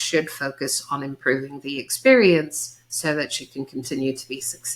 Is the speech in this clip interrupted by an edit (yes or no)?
no